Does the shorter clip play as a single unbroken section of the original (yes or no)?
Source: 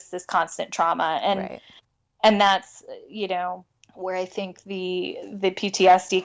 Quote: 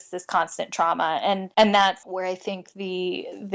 no